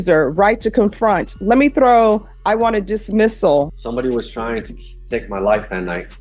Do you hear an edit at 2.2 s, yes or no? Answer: no